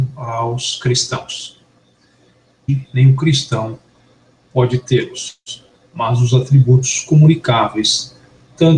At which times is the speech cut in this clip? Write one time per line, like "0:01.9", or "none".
none

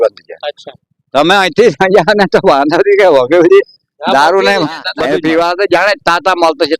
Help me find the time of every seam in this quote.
0:04.9

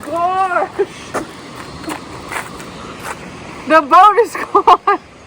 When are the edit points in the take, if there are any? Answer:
none

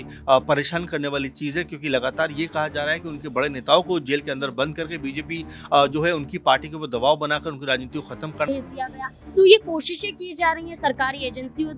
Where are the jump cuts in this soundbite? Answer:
0:08.5

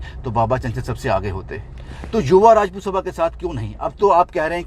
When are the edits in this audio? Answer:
none

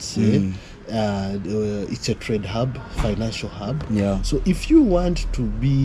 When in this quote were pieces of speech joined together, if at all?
0:04.2

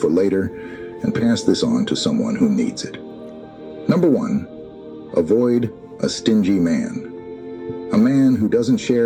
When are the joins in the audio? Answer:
none

